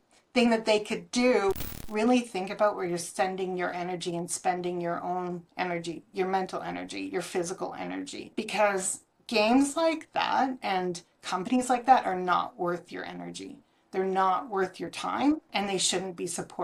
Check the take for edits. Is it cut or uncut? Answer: cut